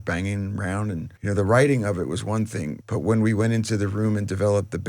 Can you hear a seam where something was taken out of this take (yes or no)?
yes